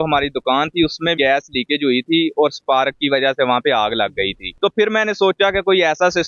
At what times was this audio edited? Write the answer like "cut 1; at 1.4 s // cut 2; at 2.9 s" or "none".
cut 1; at 1.1 s